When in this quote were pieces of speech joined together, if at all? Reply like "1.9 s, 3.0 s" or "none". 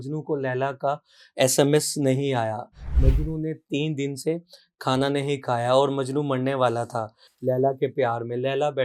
none